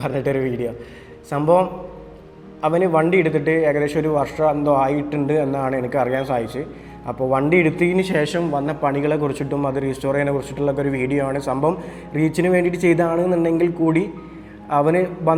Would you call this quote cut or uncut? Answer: uncut